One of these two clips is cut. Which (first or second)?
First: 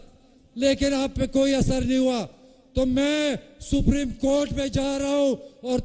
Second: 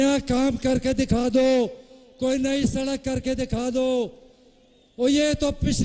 second